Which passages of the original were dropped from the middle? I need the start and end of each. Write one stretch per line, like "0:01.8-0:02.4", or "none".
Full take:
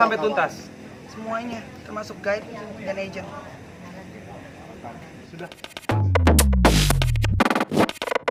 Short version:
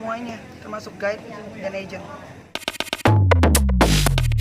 0:03.9-0:05.5